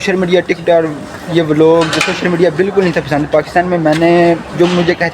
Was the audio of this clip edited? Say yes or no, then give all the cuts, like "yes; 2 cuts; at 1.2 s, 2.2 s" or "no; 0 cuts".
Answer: yes; 1 cut; at 3.9 s